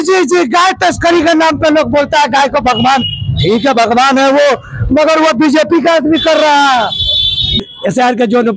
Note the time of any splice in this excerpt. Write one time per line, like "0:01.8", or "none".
0:07.5